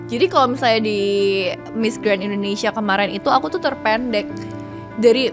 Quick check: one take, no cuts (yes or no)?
yes